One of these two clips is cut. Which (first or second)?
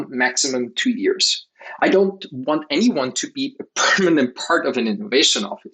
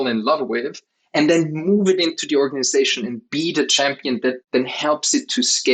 second